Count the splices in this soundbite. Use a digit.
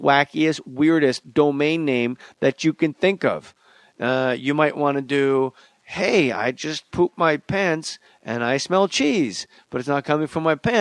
1